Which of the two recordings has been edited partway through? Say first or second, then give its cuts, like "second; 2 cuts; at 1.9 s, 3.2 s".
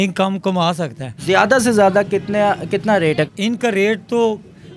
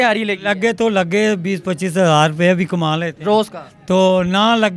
first; 2 cuts; at 1.2 s, 3.3 s